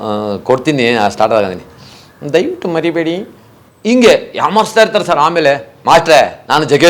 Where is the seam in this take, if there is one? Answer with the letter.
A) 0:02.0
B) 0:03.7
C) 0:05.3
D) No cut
D